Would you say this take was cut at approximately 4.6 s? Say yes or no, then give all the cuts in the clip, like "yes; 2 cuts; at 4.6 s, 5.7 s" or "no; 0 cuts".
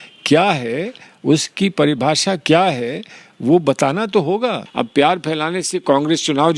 yes; 1 cut; at 4.6 s